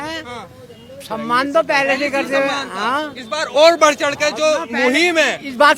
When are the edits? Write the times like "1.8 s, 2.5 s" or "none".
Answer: none